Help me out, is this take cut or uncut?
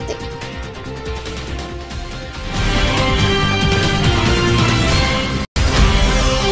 cut